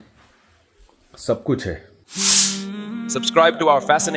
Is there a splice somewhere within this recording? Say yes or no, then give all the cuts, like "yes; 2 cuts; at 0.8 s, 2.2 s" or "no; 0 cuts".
yes; 1 cut; at 2.0 s